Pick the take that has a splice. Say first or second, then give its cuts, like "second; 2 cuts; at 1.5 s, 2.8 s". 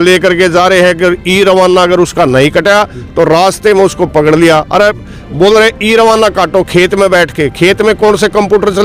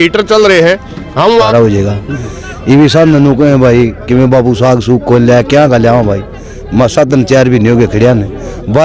second; 1 cut; at 1.5 s